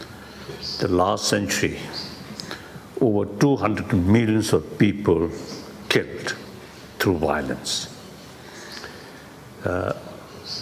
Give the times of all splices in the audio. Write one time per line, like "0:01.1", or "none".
0:04.7